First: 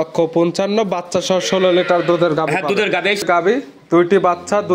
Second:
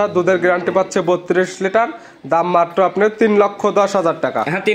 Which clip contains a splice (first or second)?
first